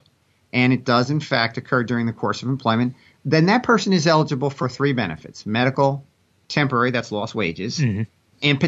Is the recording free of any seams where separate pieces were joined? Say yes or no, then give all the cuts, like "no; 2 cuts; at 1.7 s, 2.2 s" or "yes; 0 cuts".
yes; 0 cuts